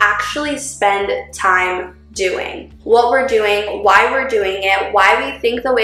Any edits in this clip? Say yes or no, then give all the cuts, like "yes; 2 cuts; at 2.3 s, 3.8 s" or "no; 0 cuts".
yes; 1 cut; at 2.7 s